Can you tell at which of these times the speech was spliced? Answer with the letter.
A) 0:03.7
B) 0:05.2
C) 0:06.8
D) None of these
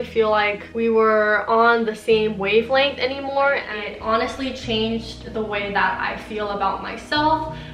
A